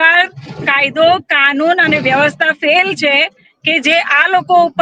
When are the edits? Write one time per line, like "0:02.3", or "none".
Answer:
none